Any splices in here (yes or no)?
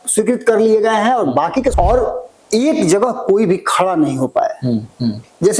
yes